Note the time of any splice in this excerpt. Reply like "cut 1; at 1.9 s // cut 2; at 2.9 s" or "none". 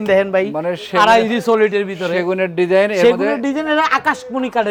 none